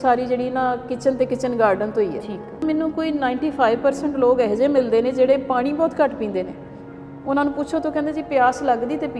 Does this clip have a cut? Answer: yes; 1 cut; at 2.6 s

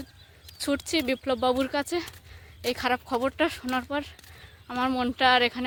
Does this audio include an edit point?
no; 0 cuts

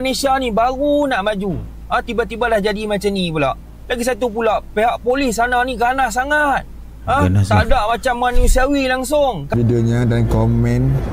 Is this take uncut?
no; 1 cut; at 9.5 s

